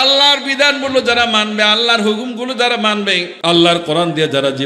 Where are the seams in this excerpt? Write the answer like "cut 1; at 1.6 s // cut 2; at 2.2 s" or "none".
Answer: cut 1; at 3.3 s